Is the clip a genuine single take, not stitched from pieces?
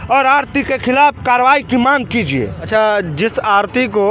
yes; 0 cuts

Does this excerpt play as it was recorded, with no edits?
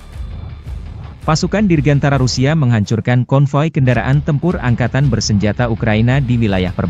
no; 1 cut; at 1.1 s

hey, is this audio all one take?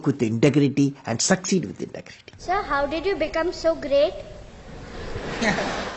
no; 1 cut; at 2.4 s

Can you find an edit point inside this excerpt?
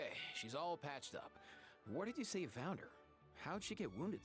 no; 0 cuts

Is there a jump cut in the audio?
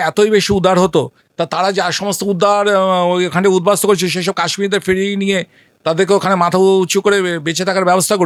no; 0 cuts

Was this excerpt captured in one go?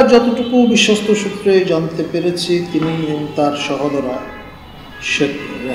yes; 0 cuts

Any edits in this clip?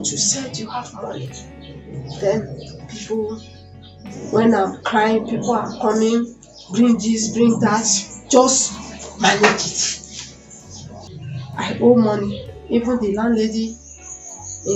yes; 1 cut; at 11.1 s

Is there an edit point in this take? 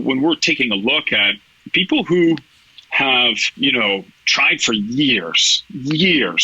yes; 1 cut; at 3.4 s

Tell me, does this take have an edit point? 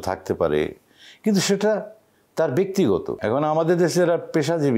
yes; 1 cut; at 3.1 s

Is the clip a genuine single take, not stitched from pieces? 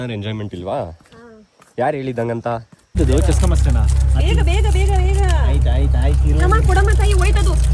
no; 1 cut; at 3.0 s

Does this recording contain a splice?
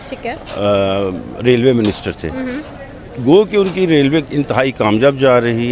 no; 0 cuts

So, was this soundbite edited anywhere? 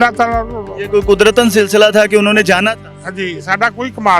no; 0 cuts

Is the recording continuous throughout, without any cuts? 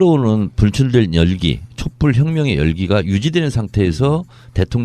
yes; 0 cuts

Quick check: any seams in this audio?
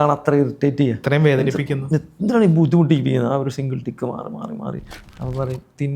yes; 1 cut; at 4.9 s

